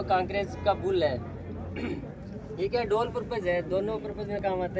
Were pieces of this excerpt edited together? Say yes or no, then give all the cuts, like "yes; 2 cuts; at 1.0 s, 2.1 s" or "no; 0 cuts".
no; 0 cuts